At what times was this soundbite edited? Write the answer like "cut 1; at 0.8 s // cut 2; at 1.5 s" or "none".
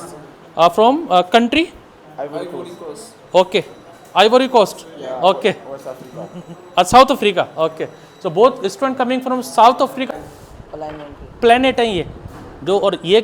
cut 1; at 10.1 s